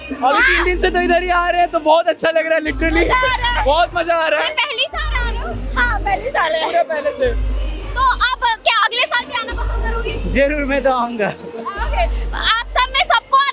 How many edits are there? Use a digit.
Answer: 0